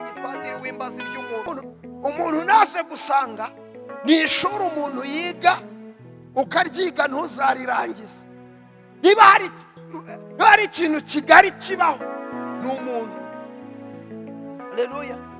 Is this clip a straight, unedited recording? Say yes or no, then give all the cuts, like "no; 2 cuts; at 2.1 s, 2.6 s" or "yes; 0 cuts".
no; 1 cut; at 1.5 s